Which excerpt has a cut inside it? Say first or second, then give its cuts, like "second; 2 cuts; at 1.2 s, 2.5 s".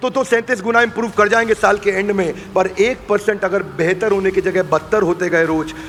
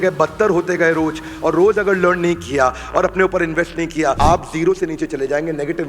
second; 1 cut; at 4.2 s